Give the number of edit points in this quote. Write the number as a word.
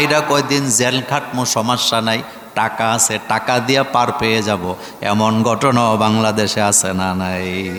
zero